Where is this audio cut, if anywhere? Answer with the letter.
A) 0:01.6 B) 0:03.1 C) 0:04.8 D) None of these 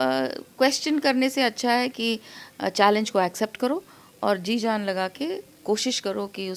D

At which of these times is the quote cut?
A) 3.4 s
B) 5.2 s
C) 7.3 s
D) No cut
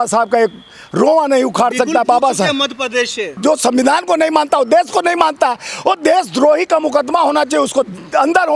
A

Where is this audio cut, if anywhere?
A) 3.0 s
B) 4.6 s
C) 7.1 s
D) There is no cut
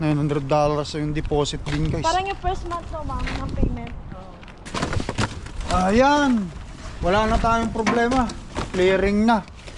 B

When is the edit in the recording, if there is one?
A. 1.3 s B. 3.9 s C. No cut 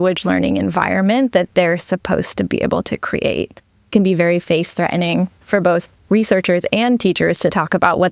B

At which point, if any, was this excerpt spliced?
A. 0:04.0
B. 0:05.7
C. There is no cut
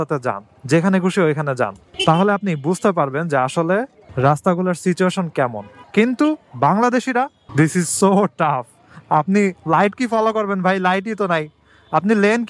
B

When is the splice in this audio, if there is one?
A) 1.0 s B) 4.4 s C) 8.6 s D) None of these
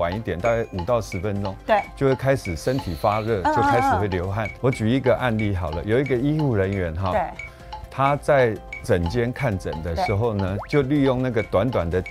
B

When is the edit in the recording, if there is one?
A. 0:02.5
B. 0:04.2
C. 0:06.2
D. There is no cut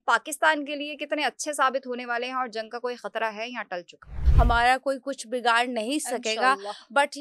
B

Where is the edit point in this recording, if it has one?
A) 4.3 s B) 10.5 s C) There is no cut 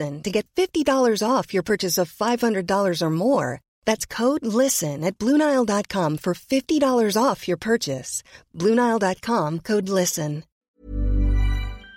B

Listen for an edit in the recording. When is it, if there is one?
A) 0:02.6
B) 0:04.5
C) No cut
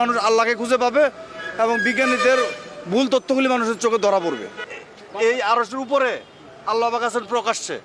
B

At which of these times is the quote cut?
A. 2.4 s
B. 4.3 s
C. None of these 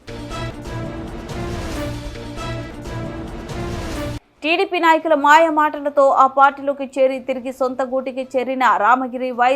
B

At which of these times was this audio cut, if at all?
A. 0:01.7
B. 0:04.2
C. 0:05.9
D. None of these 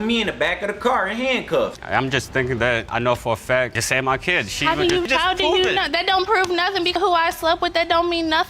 A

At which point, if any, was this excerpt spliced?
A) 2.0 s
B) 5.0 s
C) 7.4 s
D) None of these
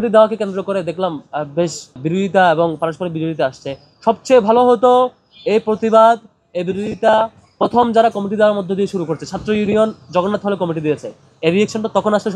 A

